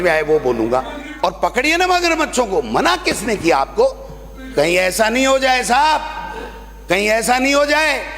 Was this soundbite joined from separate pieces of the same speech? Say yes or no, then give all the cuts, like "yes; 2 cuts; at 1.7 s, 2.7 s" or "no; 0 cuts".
yes; 1 cut; at 1.0 s